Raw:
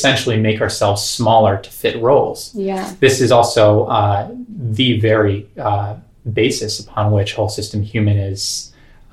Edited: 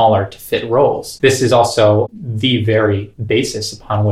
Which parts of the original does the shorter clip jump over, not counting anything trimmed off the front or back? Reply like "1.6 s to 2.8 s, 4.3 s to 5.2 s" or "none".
2.4 s to 2.9 s, 3.9 s to 4.4 s, 5.5 s to 6.2 s